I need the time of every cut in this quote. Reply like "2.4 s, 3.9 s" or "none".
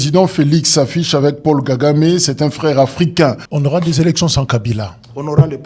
3.5 s

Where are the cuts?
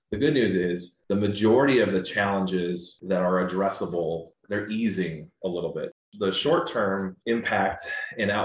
0.9 s, 2.9 s, 4.4 s, 5.9 s, 7.2 s

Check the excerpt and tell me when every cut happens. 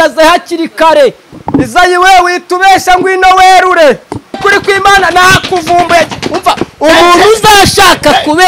1.3 s, 4.4 s

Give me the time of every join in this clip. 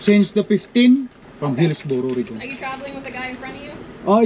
1.2 s

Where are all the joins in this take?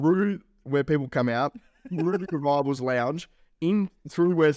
none

